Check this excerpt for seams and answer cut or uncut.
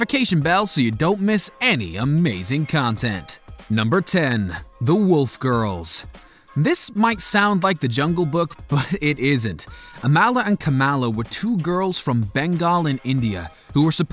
cut